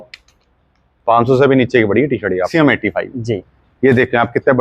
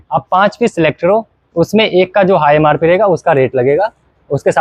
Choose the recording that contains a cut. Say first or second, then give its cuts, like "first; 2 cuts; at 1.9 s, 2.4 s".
first; 1 cut; at 2.5 s